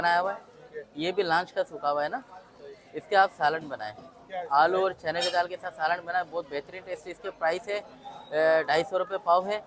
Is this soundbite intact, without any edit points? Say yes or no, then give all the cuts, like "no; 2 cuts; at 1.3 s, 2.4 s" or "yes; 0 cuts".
yes; 0 cuts